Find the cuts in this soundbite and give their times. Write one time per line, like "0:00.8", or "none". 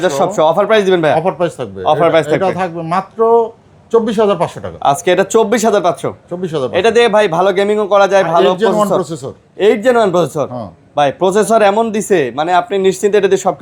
none